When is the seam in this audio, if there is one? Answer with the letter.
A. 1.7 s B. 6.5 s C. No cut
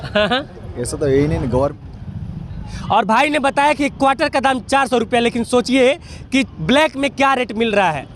A